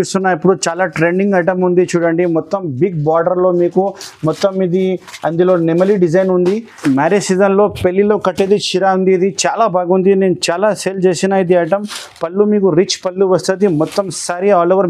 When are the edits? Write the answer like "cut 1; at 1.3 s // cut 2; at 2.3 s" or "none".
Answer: cut 1; at 6.7 s